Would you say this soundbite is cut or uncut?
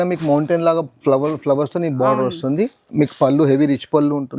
uncut